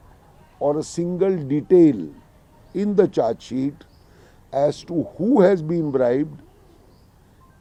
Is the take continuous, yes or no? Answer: yes